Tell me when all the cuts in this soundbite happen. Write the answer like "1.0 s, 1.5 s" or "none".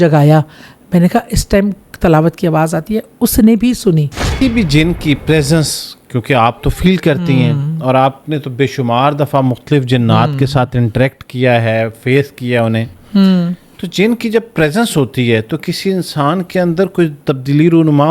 4.3 s